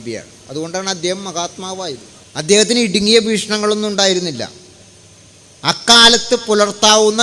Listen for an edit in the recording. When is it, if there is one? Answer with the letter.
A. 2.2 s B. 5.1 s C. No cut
A